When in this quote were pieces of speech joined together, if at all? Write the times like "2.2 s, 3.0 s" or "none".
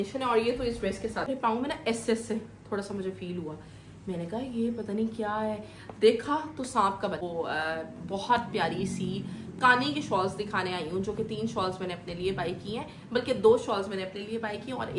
1.3 s, 7.2 s